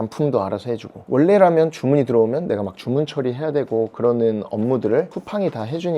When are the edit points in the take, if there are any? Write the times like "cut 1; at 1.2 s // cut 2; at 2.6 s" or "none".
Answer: cut 1; at 0.9 s